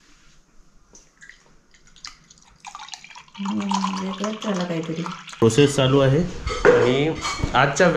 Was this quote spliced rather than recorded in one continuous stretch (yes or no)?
yes